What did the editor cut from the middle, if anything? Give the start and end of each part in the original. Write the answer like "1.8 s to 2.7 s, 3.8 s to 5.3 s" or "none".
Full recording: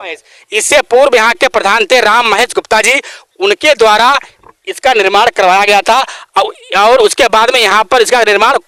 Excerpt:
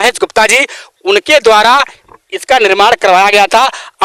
none